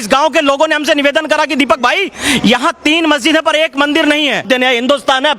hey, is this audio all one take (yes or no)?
no